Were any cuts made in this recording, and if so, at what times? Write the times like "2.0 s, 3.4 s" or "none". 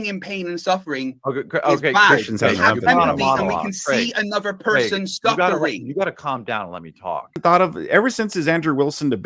7.4 s